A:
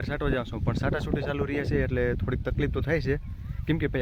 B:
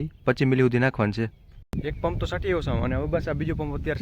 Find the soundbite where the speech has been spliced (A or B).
B